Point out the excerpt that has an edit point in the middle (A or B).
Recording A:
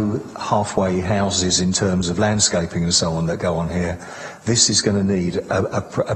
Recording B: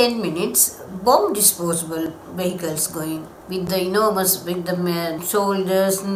B